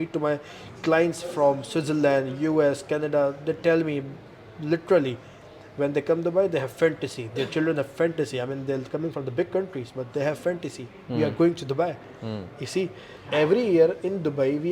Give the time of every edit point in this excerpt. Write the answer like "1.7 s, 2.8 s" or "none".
13.1 s